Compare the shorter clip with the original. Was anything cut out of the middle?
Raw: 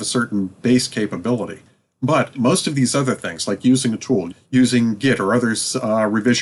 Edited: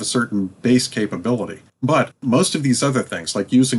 yes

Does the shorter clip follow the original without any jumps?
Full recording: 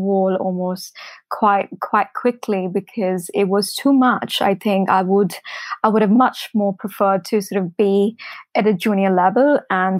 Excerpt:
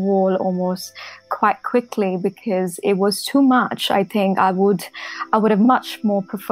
no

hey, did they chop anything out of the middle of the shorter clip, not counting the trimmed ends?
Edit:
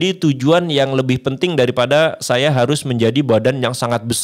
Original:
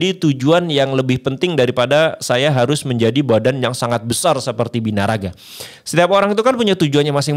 no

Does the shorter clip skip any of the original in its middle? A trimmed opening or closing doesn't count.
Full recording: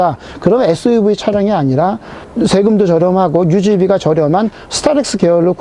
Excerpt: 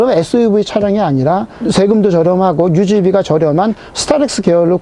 yes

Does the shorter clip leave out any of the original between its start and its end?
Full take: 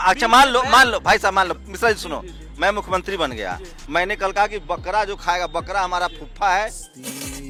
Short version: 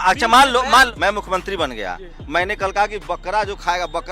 yes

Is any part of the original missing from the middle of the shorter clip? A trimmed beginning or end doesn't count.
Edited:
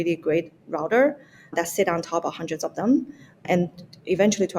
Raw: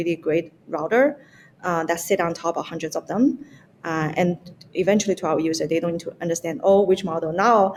yes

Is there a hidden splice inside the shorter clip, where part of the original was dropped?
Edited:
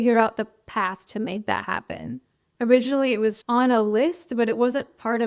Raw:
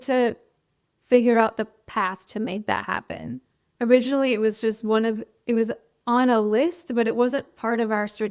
yes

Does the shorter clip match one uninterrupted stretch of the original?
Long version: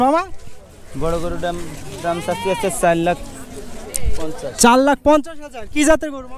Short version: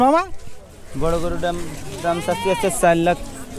yes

